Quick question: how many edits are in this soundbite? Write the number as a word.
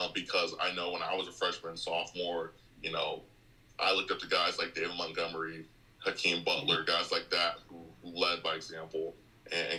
zero